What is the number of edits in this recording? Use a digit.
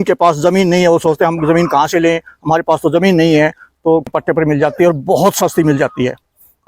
1